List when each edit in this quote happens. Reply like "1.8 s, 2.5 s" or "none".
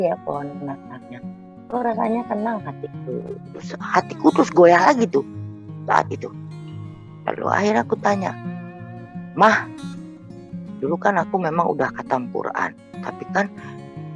3.7 s